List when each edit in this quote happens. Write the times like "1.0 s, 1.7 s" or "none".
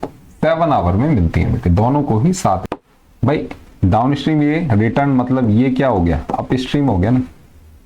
2.6 s